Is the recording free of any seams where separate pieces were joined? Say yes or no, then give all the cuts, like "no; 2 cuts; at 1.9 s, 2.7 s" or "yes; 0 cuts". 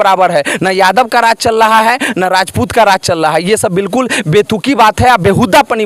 yes; 0 cuts